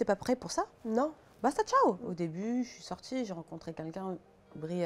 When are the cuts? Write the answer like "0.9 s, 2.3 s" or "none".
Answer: 2.0 s